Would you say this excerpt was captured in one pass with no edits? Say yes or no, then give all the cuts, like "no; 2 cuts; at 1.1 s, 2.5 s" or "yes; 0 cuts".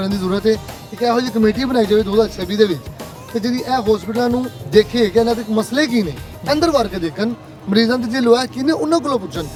yes; 0 cuts